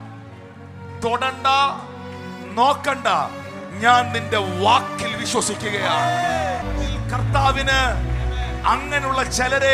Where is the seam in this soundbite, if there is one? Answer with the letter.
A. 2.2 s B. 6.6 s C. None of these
B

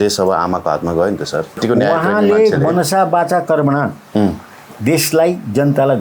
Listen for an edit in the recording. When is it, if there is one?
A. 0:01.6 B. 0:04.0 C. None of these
A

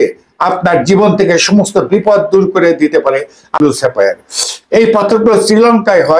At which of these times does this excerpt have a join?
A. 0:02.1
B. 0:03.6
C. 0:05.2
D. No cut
B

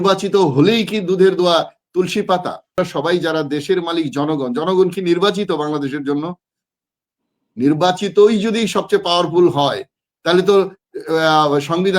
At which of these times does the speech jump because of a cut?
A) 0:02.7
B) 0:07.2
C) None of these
A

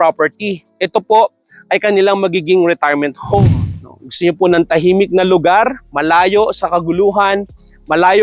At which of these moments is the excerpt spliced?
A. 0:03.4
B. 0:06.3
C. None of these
A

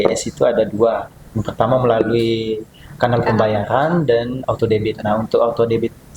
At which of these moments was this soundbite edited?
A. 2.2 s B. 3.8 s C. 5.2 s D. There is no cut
D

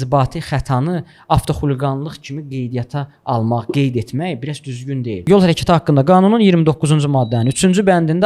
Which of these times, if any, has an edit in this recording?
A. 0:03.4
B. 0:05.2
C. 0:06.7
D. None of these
B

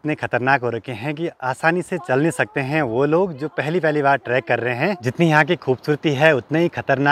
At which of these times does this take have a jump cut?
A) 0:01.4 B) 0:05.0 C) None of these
B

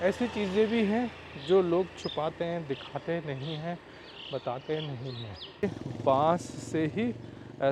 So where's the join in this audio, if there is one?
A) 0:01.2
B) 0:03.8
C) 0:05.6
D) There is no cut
C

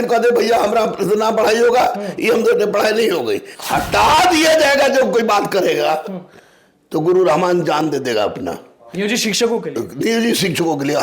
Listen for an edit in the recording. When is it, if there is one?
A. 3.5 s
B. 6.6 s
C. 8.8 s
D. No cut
A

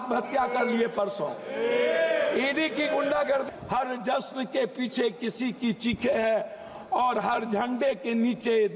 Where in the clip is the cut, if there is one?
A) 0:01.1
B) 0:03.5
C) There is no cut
B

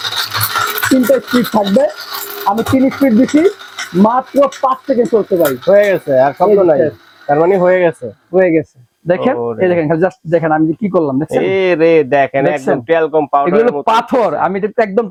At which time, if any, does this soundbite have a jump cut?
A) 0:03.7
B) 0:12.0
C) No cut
C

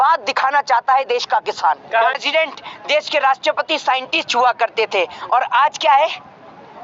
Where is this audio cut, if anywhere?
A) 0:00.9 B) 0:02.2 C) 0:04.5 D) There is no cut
B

